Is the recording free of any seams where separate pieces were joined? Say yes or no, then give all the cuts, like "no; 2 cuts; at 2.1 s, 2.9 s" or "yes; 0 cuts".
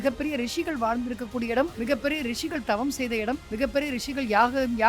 no; 2 cuts; at 1.7 s, 3.5 s